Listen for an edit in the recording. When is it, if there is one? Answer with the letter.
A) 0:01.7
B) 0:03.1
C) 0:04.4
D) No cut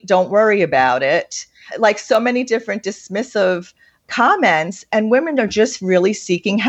A